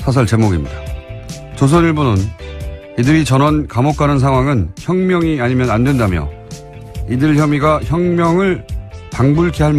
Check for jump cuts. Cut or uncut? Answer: uncut